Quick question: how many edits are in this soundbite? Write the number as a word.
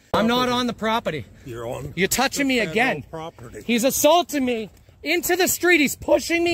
zero